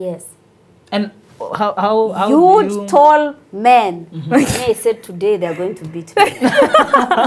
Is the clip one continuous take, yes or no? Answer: yes